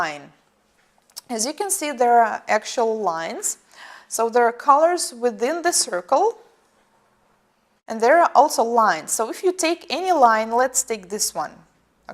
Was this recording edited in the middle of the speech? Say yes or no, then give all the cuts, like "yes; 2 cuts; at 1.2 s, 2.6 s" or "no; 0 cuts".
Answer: yes; 1 cut; at 1.4 s